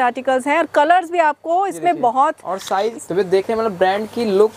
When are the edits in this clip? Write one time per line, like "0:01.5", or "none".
0:02.9